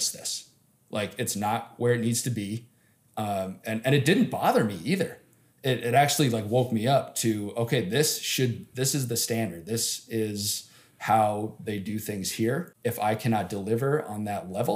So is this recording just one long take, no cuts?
no; 1 cut; at 12.7 s

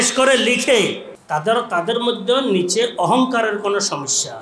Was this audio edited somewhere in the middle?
yes; 1 cut; at 1.1 s

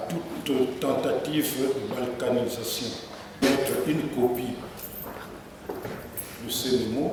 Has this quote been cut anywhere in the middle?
no; 0 cuts

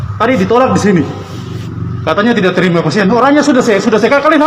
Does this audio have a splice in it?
no; 0 cuts

